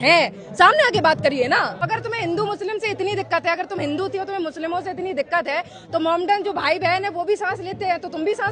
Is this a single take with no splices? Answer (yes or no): no